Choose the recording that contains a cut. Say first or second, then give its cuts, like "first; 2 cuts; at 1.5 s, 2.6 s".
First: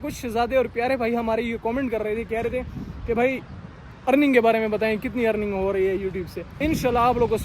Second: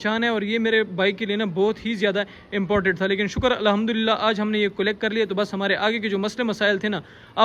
first; 1 cut; at 6.4 s